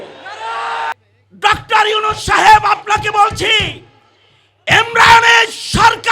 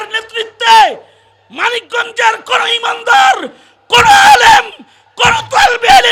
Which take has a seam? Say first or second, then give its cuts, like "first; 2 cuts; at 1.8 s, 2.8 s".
first; 1 cut; at 0.9 s